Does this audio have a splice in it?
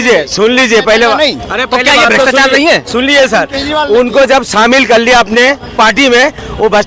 no; 0 cuts

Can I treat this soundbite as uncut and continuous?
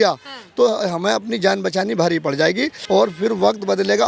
no; 1 cut; at 2.7 s

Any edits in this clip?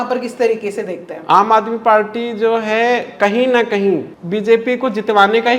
yes; 1 cut; at 4.2 s

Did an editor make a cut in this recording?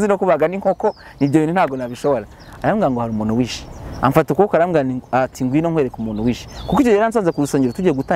no; 0 cuts

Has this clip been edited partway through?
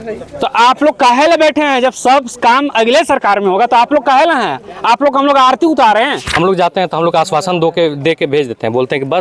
yes; 1 cut; at 6.3 s

